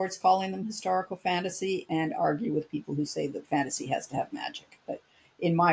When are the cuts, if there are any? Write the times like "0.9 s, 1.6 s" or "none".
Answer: none